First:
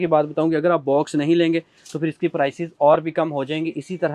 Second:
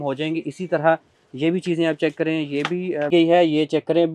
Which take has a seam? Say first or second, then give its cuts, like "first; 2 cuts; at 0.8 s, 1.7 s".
second; 1 cut; at 3.1 s